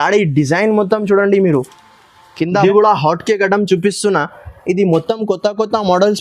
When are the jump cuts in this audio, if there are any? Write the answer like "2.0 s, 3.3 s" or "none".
2.2 s